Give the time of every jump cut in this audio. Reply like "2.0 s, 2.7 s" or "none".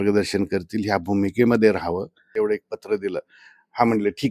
2.2 s